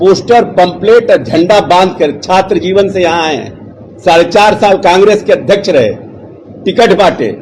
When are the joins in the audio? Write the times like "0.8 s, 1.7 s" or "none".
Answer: none